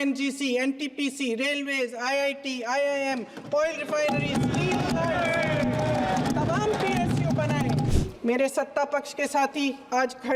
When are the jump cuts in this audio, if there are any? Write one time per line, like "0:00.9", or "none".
0:07.9

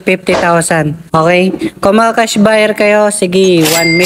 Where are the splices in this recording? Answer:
0:01.0

